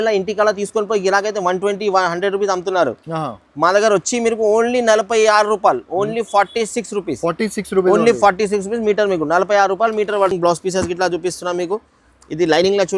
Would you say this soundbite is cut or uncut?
uncut